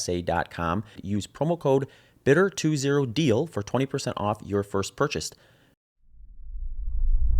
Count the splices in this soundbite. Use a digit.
2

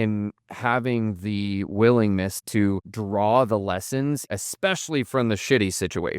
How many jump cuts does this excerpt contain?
2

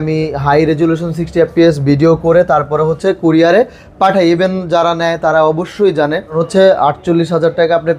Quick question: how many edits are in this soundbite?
1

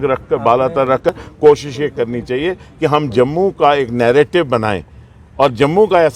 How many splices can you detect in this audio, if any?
1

